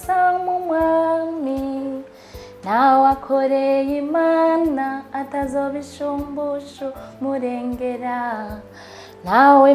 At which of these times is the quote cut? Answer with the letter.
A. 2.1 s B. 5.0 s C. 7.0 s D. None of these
D